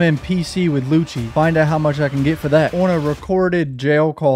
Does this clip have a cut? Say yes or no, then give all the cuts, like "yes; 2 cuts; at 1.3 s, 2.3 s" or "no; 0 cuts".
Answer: yes; 2 cuts; at 1.2 s, 2.7 s